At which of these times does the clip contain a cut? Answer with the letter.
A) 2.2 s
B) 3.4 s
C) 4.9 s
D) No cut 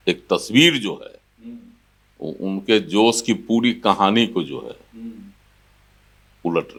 D